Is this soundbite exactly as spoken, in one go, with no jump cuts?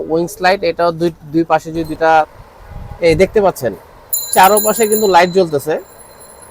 no; 1 cut; at 2.4 s

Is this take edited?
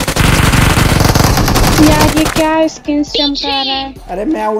no; 0 cuts

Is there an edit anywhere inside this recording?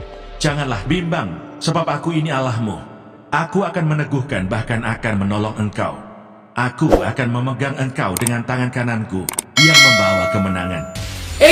no; 0 cuts

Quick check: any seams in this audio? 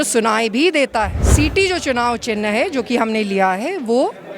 yes; 1 cut; at 1.2 s

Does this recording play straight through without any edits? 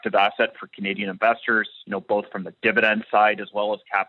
yes; 0 cuts

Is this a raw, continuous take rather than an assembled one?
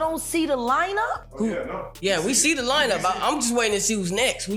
no; 1 cut; at 1.2 s

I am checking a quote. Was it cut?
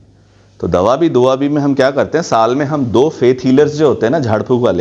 no; 0 cuts

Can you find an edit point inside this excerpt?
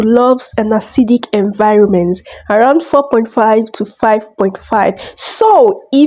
no; 0 cuts

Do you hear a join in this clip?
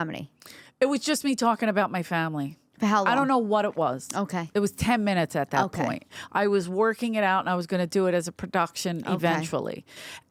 no; 0 cuts

